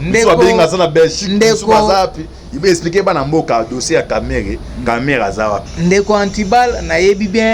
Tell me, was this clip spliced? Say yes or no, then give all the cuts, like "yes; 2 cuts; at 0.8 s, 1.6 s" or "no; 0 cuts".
no; 0 cuts